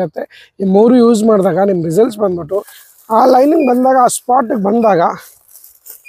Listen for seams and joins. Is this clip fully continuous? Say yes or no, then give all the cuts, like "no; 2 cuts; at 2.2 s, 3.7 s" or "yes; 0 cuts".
no; 1 cut; at 2.8 s